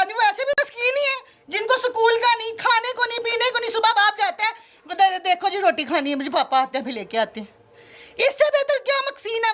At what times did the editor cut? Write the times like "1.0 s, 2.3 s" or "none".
none